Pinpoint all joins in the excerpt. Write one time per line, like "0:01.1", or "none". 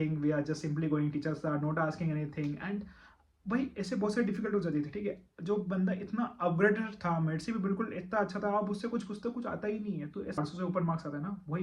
0:10.4